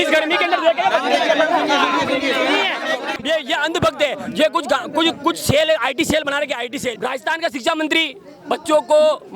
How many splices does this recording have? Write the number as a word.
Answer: two